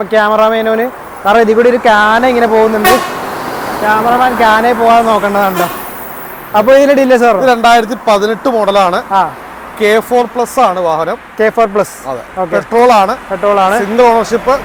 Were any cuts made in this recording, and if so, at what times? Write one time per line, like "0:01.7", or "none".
none